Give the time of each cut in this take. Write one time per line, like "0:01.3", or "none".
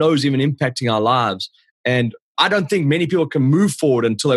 none